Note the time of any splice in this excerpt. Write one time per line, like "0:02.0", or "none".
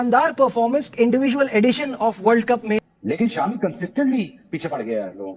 0:02.9